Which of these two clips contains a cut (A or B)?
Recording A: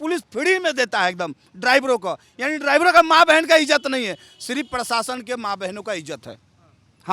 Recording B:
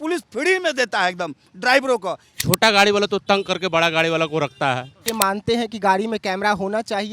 B